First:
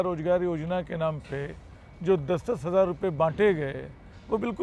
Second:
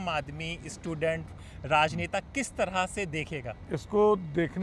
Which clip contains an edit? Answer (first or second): second